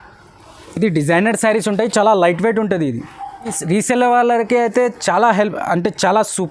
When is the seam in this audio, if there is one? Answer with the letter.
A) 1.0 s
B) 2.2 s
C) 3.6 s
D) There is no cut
C